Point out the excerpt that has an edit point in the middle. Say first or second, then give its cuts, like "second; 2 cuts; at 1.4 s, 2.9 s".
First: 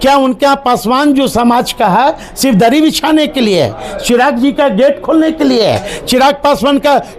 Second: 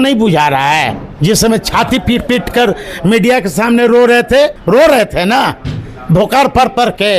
second; 2 cuts; at 1.0 s, 4.6 s